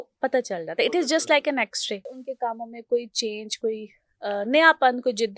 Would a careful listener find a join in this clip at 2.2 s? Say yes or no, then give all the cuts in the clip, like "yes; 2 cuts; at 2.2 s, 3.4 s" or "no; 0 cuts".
yes; 1 cut; at 2.2 s